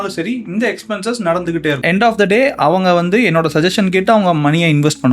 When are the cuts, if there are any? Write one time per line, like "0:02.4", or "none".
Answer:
0:01.8